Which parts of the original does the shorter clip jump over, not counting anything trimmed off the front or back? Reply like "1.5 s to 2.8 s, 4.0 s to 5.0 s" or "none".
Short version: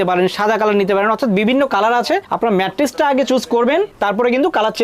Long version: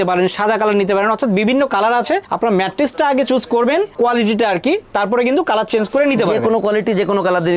3.9 s to 4.8 s